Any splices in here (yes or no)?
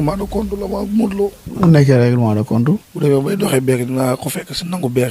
yes